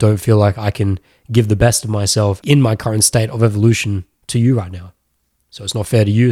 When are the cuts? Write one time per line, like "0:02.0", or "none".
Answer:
0:02.4